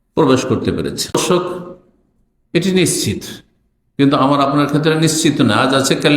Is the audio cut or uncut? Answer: cut